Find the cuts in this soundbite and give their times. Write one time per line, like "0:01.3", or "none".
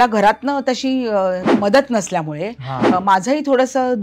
0:01.4